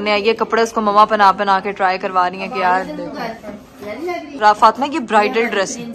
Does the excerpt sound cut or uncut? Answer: uncut